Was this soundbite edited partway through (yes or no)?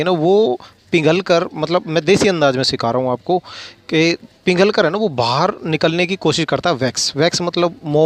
no